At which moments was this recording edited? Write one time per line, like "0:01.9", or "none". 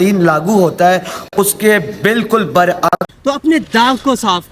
0:03.1